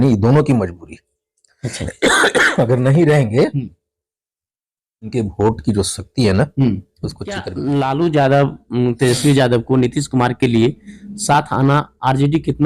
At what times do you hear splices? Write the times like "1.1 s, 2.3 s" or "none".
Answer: 7.5 s

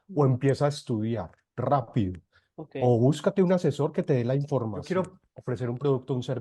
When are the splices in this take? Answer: 4.8 s

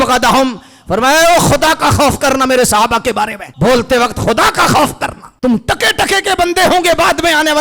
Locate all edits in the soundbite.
3.4 s, 5.2 s

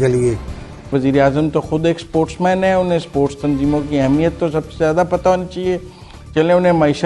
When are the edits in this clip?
0.9 s

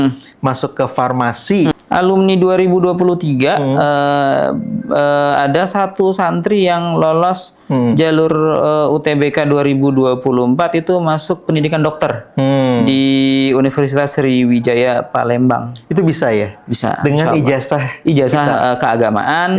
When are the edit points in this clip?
1.7 s

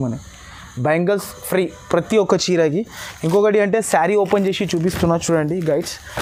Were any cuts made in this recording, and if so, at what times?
none

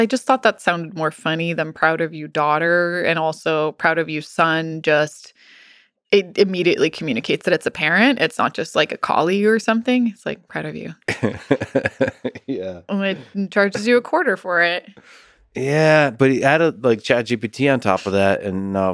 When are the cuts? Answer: none

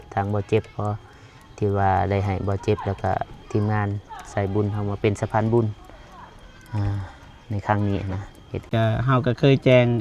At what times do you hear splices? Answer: 8.7 s

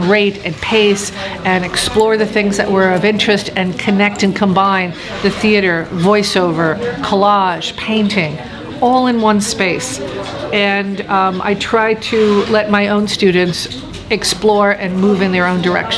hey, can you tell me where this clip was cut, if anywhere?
none

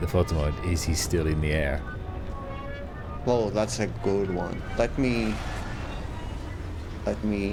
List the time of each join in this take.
none

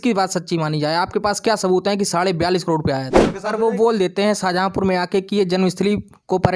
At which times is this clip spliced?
3.4 s

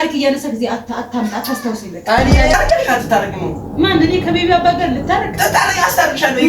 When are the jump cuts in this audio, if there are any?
2.5 s

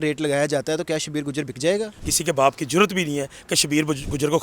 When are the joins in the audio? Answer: 2.0 s

